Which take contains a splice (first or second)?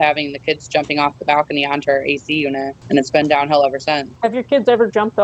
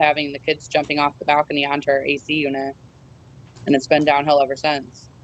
first